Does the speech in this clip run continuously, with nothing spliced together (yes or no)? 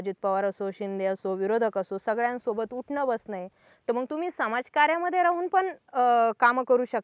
yes